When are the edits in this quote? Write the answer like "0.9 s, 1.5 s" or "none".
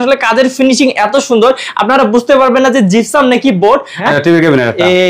4.0 s